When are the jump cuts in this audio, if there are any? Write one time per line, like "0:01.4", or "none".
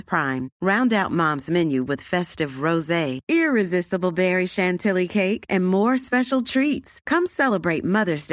none